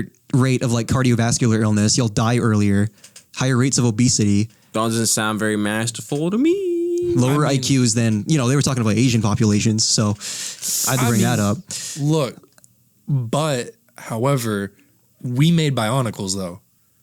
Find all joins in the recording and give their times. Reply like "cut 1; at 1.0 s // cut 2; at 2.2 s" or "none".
none